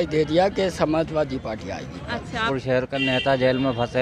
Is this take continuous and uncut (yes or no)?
no